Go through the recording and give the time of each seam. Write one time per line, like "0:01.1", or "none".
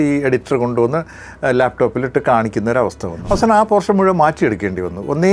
0:03.1